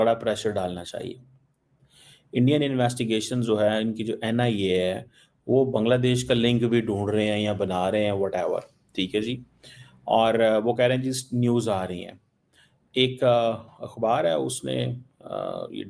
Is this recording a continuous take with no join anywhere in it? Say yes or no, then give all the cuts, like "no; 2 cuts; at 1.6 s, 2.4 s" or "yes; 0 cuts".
yes; 0 cuts